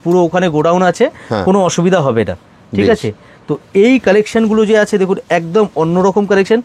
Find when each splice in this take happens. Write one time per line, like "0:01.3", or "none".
none